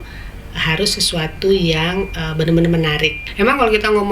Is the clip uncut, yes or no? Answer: no